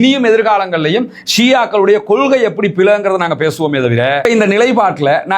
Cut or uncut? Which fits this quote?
cut